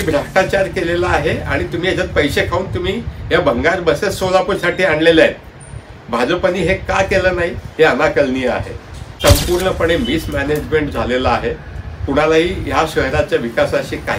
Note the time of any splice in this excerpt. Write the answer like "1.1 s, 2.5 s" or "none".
9.2 s